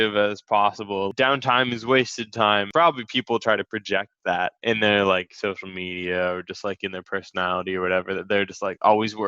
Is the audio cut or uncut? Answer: cut